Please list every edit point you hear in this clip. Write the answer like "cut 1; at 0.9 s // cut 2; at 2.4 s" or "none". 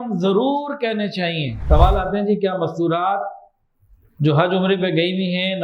cut 1; at 1.5 s